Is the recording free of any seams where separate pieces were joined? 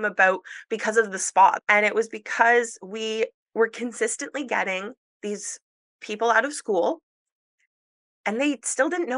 no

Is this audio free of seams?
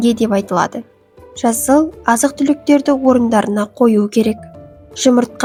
yes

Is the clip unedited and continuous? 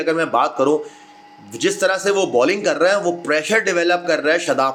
yes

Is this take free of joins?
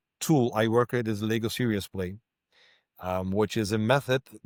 yes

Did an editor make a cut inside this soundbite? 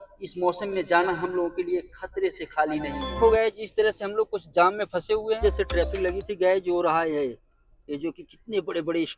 yes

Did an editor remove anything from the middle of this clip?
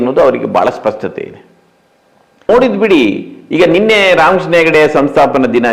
yes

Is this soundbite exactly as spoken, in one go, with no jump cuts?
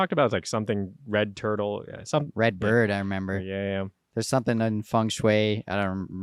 yes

